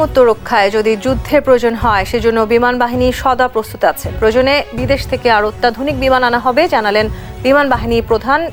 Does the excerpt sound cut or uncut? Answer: uncut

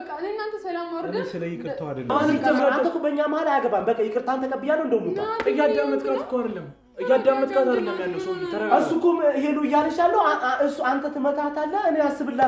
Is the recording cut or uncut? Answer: cut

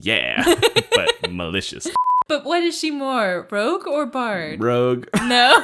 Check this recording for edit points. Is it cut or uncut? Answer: cut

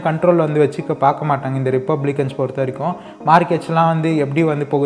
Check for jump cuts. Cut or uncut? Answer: uncut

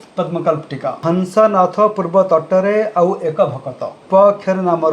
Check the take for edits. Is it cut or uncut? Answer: cut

